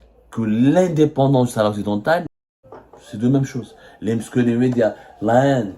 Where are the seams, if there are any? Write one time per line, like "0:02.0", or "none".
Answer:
0:02.3